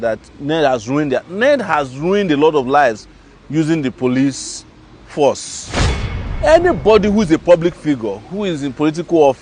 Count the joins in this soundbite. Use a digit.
1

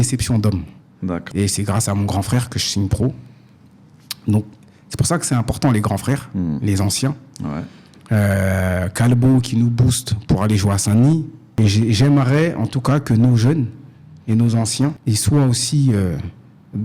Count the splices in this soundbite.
3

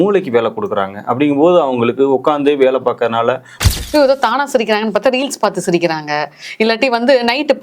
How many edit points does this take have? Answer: 1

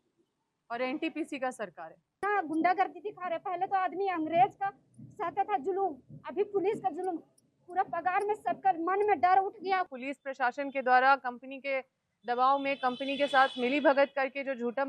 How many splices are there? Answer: 2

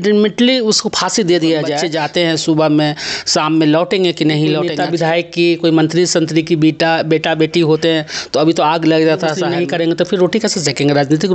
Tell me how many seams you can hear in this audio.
3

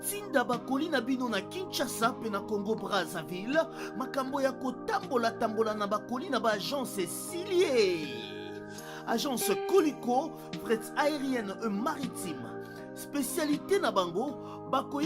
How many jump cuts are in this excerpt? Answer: 0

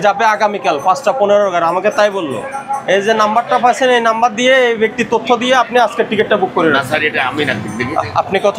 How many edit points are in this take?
0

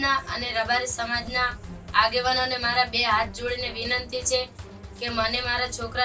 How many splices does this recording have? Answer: 0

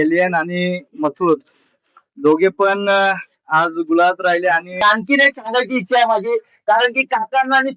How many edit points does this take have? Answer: 1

